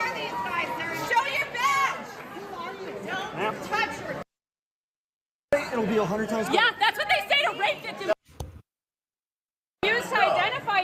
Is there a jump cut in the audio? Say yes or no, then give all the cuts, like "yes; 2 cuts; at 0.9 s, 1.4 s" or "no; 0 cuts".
no; 0 cuts